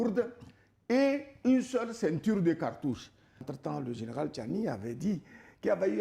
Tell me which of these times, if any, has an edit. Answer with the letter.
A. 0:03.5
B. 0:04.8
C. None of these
A